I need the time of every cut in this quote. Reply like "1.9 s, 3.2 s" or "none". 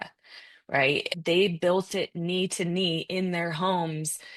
1.1 s